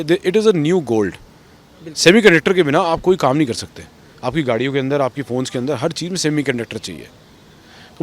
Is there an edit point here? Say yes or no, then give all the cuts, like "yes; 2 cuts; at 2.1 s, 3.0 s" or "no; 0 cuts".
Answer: no; 0 cuts